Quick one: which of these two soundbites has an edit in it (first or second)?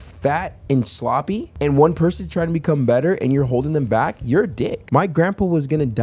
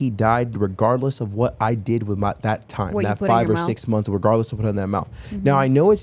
first